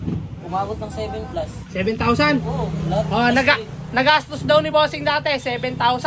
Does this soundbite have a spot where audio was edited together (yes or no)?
no